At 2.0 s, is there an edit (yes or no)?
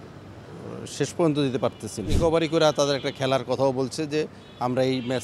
yes